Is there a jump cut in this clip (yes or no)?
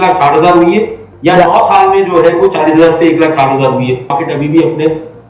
yes